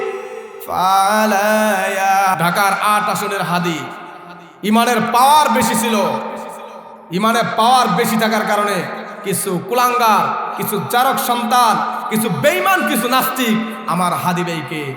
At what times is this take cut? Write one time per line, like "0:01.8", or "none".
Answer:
0:02.3